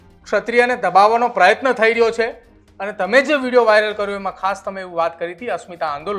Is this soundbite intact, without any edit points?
yes; 0 cuts

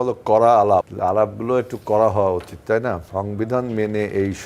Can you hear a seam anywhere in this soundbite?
yes; 2 cuts; at 0.9 s, 3.0 s

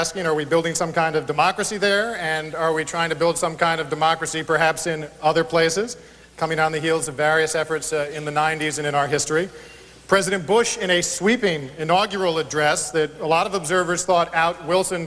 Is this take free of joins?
yes; 0 cuts

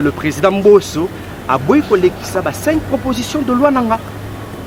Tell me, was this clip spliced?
no; 0 cuts

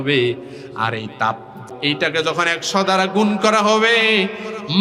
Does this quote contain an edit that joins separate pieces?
yes; 1 cut; at 1.7 s

